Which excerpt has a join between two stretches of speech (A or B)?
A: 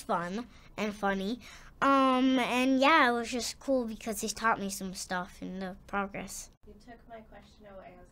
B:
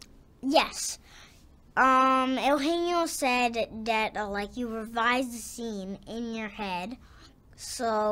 A